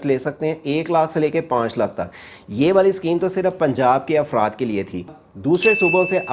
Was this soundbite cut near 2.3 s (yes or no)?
no